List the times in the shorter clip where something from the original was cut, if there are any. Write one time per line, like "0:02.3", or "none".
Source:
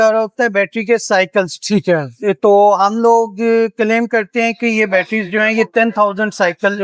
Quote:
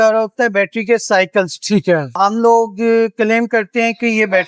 0:02.2